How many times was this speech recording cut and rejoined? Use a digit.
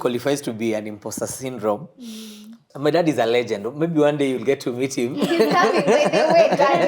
1